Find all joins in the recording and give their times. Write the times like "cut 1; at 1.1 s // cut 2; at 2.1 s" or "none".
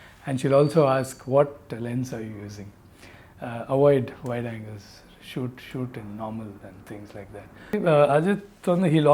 cut 1; at 7.7 s

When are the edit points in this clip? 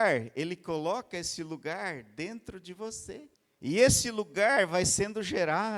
cut 1; at 3.4 s

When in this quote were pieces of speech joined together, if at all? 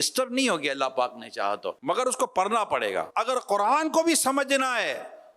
cut 1; at 1.7 s // cut 2; at 3.1 s

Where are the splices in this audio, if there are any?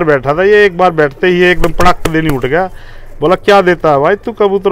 none

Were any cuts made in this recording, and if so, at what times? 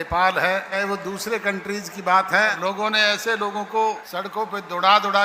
cut 1; at 0.8 s // cut 2; at 2.6 s // cut 3; at 4.0 s

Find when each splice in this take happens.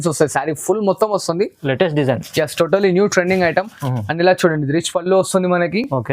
none

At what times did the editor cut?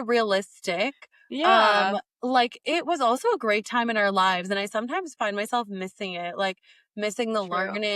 none

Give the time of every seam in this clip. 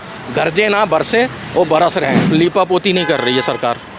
cut 1; at 2.2 s

